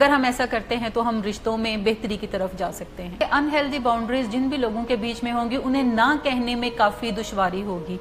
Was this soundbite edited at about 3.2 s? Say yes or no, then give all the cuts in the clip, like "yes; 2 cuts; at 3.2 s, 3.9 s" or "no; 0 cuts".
yes; 1 cut; at 3.2 s